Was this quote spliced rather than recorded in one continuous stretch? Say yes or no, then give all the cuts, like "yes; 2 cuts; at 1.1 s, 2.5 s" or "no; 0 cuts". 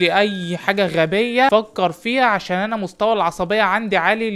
yes; 1 cut; at 1.5 s